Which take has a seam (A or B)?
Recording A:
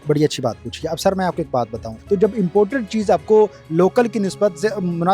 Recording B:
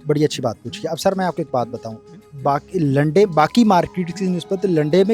A